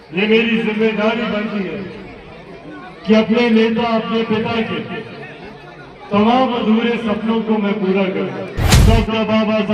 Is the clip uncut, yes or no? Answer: no